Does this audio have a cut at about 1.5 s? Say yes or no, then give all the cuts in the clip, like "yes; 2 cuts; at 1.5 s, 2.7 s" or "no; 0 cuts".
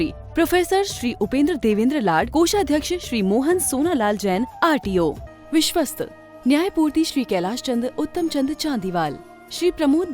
no; 1 cut; at 5.3 s